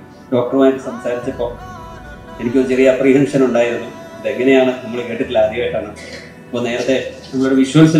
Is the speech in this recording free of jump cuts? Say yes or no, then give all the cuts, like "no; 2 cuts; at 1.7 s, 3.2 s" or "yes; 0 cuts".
yes; 0 cuts